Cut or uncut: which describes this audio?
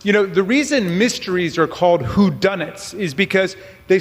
uncut